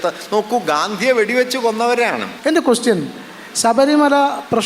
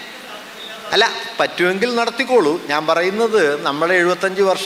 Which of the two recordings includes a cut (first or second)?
first